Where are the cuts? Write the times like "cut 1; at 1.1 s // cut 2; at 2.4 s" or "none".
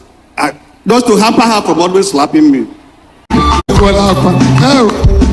cut 1; at 3.2 s